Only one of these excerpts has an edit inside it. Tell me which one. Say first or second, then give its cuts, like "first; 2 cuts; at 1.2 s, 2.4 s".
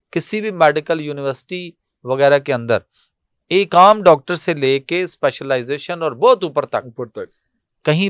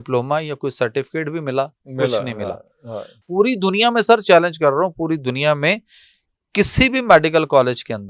second; 1 cut; at 3.2 s